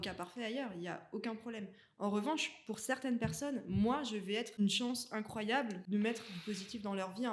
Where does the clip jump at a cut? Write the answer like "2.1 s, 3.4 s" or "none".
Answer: 4.6 s, 5.8 s